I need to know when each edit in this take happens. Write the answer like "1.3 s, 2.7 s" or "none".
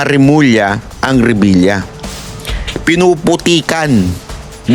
none